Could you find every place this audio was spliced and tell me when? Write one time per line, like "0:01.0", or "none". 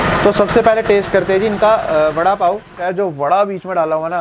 0:02.8